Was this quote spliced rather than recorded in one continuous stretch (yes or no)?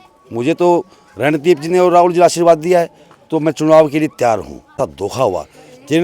yes